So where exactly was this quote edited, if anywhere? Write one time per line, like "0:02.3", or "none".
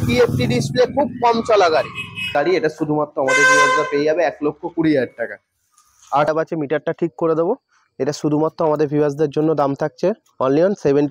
0:02.3
0:06.3